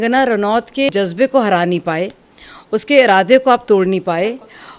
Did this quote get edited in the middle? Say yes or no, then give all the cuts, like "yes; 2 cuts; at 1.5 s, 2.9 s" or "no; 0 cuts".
yes; 1 cut; at 0.9 s